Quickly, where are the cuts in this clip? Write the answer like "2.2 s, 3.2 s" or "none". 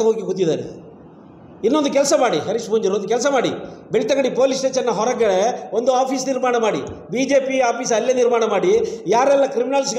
none